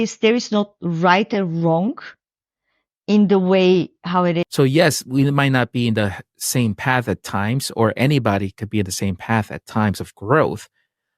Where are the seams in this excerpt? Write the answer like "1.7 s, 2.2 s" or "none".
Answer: 4.5 s